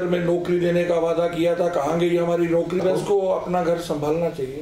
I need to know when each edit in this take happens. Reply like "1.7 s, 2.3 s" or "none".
2.8 s